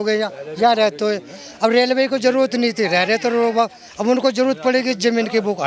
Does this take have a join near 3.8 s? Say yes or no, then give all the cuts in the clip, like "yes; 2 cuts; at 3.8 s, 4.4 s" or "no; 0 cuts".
no; 0 cuts